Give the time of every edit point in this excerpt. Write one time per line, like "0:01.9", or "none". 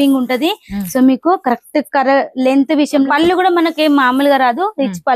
0:03.1